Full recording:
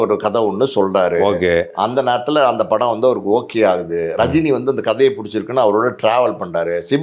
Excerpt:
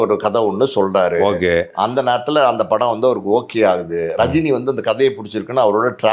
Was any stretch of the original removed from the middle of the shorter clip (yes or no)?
no